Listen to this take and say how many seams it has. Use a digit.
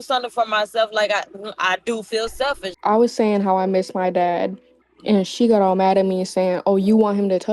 1